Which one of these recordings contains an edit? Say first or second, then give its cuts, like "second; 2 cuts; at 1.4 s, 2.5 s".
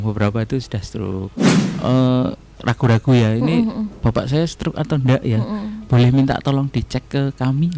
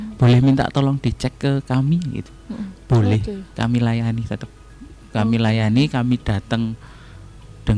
first; 1 cut; at 1.5 s